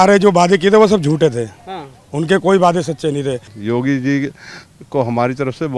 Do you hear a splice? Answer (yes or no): yes